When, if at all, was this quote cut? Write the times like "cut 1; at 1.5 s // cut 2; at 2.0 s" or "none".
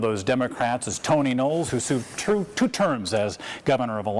cut 1; at 2.7 s